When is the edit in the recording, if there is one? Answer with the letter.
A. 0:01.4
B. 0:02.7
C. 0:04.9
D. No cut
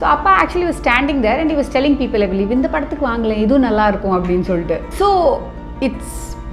C